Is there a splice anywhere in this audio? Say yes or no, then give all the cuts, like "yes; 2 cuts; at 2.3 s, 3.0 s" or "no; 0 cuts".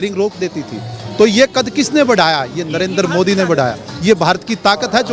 no; 0 cuts